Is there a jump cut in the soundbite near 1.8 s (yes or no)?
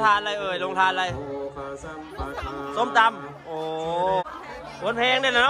no